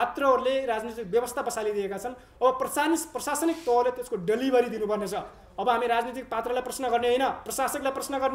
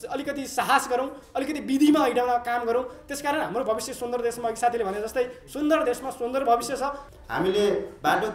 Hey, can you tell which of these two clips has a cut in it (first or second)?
second